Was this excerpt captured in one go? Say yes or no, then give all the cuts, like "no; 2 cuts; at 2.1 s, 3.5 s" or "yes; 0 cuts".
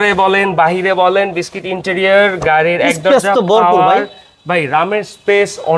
yes; 0 cuts